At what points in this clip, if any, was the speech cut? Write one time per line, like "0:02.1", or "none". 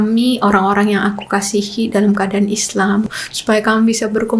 0:03.1